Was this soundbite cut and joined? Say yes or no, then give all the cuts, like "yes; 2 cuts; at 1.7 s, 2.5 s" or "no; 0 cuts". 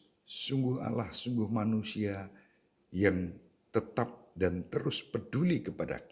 no; 0 cuts